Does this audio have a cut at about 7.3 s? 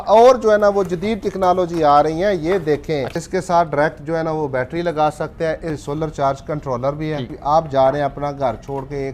yes; 3 cuts; at 3.1 s, 5.9 s, 7.3 s

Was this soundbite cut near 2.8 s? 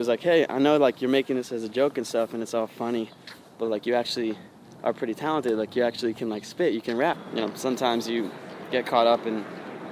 no; 1 cut; at 7.2 s

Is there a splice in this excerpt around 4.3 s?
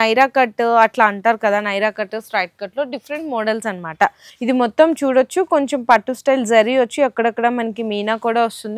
yes; 1 cut; at 4.3 s

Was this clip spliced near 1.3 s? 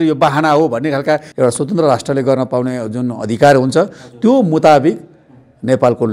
yes; 1 cut; at 1.3 s

